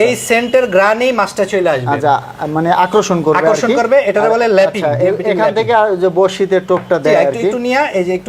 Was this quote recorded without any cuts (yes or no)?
yes